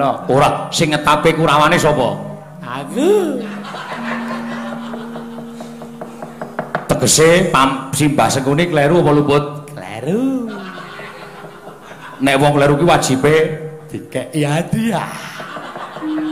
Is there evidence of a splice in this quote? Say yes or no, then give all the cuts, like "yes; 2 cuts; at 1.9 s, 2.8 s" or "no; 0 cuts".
yes; 1 cut; at 8.3 s